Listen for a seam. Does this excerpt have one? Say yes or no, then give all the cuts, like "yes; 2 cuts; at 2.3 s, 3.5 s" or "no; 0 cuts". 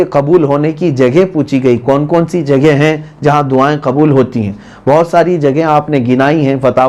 no; 0 cuts